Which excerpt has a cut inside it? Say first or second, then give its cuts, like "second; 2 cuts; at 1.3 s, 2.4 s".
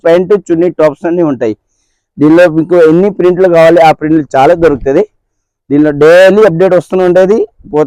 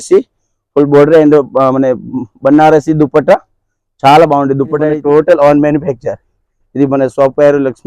second; 1 cut; at 4.9 s